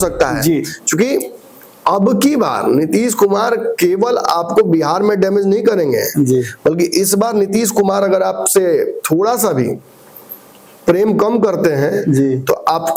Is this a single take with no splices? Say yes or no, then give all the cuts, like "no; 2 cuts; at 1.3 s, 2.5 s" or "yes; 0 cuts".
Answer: yes; 0 cuts